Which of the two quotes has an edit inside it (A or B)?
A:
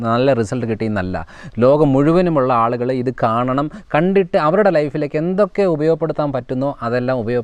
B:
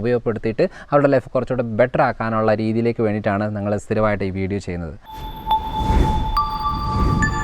B